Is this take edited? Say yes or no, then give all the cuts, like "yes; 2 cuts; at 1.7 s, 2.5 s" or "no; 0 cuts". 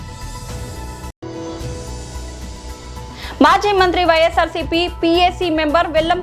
yes; 2 cuts; at 1.1 s, 3.3 s